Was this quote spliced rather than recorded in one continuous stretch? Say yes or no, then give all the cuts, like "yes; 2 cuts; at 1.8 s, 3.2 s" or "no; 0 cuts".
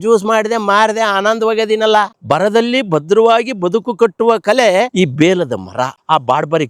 yes; 1 cut; at 4.9 s